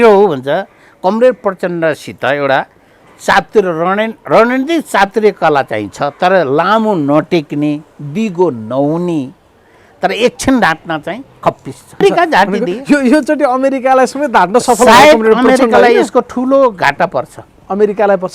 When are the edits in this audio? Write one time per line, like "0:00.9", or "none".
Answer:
0:12.0